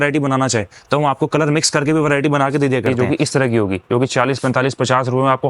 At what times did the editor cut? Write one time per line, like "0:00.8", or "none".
0:02.9